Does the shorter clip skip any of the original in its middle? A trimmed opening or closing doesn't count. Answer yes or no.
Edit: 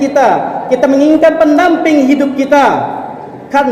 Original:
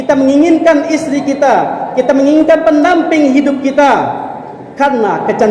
no